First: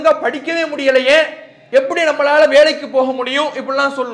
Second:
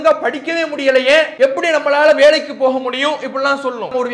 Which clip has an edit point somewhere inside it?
second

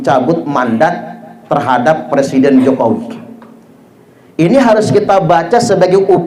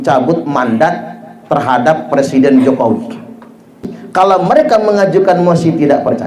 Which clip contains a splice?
second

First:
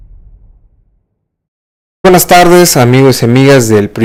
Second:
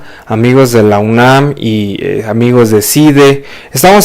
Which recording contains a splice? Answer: second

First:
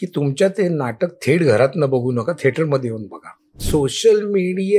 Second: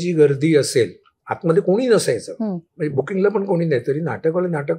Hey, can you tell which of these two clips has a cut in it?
first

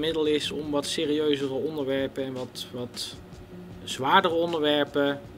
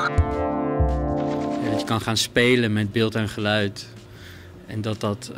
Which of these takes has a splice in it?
second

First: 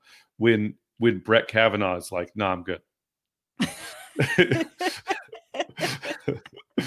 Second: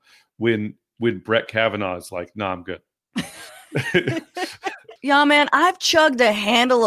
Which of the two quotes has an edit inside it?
second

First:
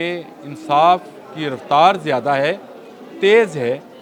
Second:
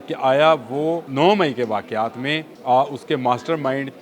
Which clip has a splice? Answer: second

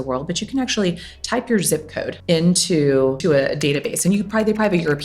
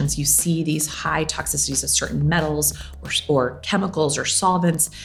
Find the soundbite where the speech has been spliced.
first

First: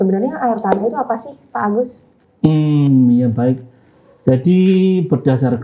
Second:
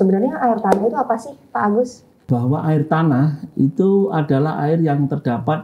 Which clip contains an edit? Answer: second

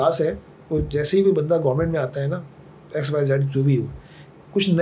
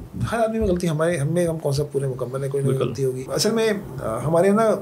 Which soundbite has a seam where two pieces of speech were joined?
second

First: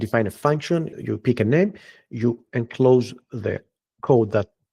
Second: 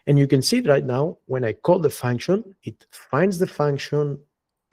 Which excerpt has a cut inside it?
first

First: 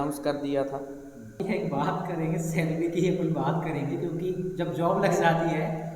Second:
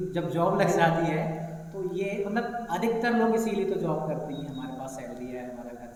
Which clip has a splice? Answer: first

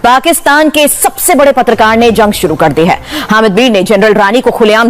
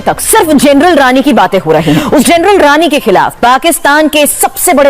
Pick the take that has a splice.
second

